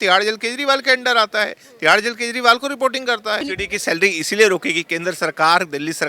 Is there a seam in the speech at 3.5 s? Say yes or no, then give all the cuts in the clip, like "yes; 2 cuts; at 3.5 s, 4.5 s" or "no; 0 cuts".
yes; 1 cut; at 3.5 s